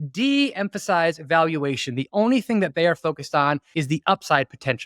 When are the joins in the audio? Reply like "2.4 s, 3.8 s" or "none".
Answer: 3.7 s